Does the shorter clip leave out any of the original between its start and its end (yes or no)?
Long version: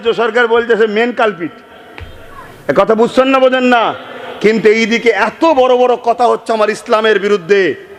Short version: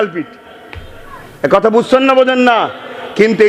no